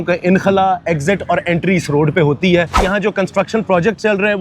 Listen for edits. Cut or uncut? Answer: cut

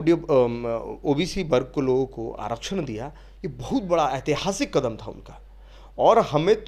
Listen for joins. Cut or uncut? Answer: uncut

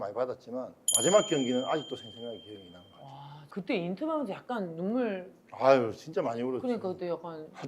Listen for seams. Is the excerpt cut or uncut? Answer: cut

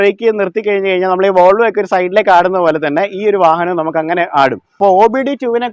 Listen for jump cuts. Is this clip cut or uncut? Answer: cut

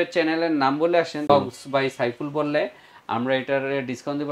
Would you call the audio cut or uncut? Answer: cut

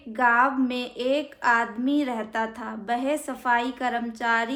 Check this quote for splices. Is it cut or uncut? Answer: uncut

